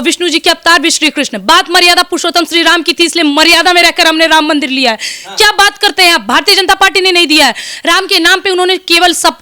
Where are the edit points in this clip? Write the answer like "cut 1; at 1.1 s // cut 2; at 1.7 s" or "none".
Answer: none